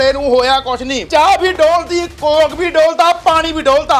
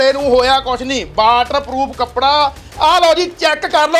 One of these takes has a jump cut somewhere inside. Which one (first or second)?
first